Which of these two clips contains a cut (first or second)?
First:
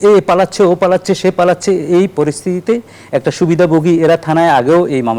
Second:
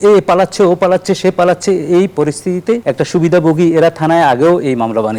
second